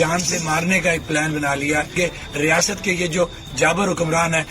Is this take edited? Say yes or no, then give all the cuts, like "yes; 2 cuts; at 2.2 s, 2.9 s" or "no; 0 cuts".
yes; 1 cut; at 1.9 s